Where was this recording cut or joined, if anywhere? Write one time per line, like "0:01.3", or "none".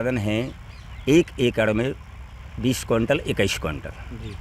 none